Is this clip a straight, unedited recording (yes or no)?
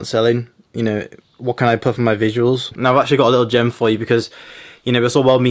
no